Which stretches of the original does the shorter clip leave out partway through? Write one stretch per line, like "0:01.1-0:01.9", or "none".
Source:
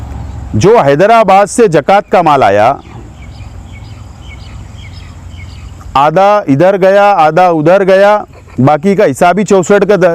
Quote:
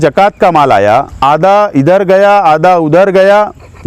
0:02.8-0:05.8